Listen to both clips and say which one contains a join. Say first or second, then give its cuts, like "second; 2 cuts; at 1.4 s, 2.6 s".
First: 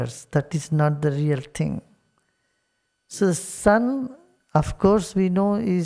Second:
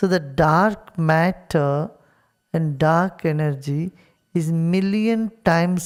first; 1 cut; at 3.2 s